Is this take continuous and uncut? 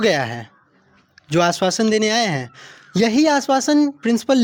yes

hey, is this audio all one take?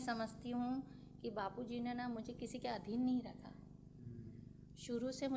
yes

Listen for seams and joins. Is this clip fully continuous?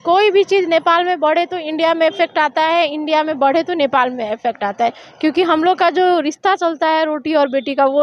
yes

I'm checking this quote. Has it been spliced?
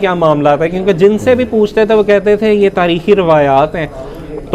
no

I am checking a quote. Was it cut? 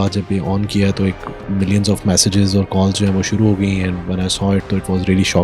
no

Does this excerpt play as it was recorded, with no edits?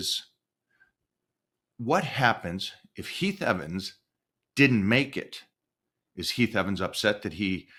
yes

